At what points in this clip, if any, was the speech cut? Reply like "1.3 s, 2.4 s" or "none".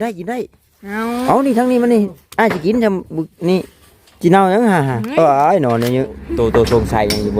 6.3 s